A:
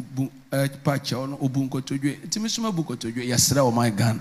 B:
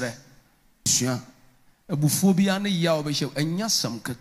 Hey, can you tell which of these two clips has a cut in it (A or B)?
B